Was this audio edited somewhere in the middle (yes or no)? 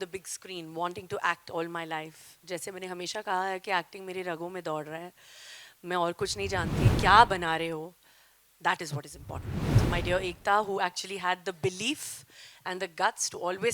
yes